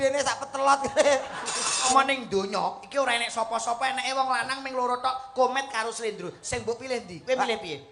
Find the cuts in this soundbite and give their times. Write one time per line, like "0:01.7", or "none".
0:01.9

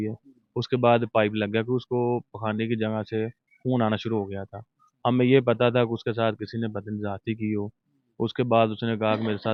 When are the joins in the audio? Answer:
none

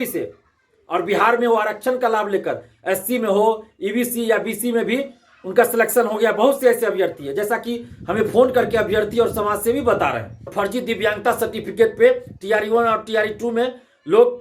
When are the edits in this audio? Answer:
0:10.5

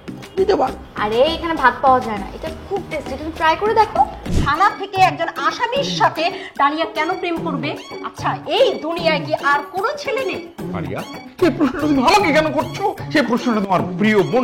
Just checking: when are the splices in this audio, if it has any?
0:04.3

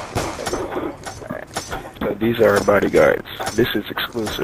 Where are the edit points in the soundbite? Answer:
0:02.5

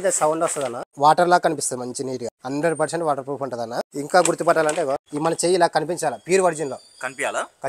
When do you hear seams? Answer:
0:00.9
0:02.3
0:03.9
0:05.1

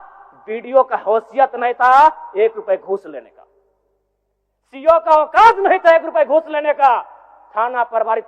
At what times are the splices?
none

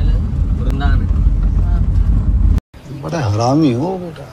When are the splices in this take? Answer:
none

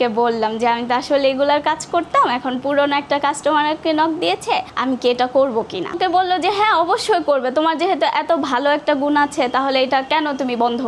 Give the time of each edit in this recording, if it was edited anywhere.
none

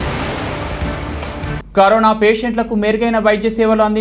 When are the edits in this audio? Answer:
0:01.1

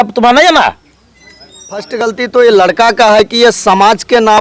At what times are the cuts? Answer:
0:01.9

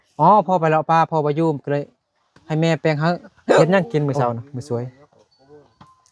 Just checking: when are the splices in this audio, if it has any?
0:03.4

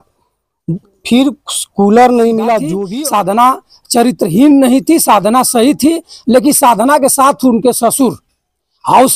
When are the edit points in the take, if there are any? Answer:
0:02.8

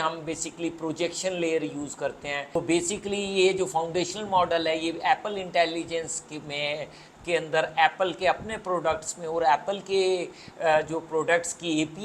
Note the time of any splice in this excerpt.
0:02.5

